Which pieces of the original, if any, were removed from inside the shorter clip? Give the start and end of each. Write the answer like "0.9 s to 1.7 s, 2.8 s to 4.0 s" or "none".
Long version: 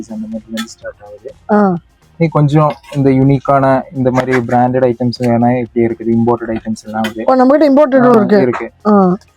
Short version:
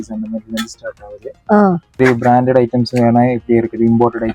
2.0 s to 4.2 s